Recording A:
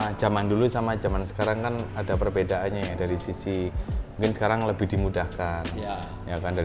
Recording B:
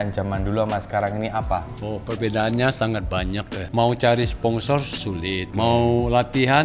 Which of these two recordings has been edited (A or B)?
B